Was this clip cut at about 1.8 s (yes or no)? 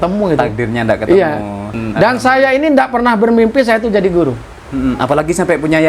yes